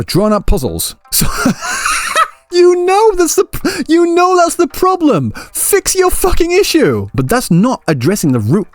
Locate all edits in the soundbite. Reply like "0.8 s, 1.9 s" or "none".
2.4 s, 7.1 s